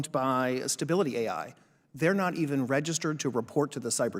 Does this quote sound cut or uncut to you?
uncut